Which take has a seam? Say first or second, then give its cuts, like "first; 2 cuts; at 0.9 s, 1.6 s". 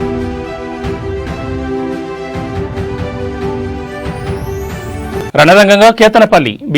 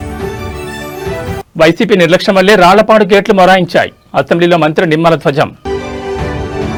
first; 1 cut; at 5.2 s